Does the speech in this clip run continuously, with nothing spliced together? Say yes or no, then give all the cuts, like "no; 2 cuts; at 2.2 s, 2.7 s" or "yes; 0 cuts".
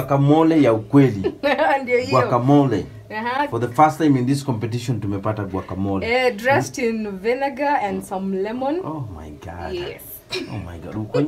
yes; 0 cuts